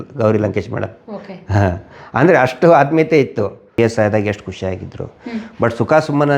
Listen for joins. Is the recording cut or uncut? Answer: cut